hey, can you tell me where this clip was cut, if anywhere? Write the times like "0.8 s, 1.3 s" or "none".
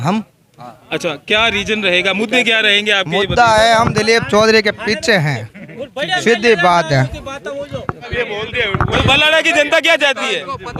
none